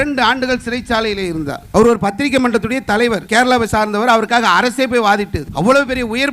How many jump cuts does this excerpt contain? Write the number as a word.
three